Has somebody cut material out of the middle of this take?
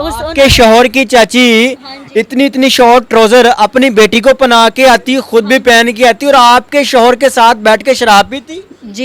no; 0 cuts

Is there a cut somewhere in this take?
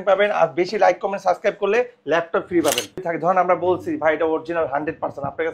yes; 1 cut; at 3.0 s

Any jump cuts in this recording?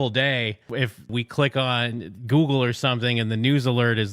yes; 1 cut; at 0.9 s

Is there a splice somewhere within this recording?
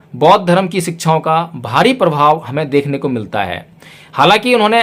no; 0 cuts

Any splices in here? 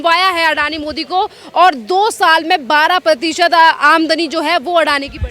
no; 0 cuts

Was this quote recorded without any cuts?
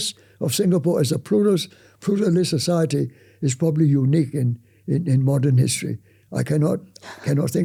yes; 0 cuts

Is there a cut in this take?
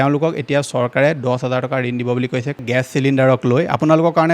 yes; 1 cut; at 2.6 s

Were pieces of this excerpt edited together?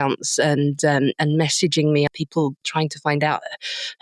yes; 1 cut; at 2.3 s

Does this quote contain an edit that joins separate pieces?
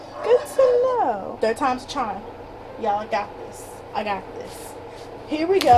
yes; 1 cut; at 1.3 s

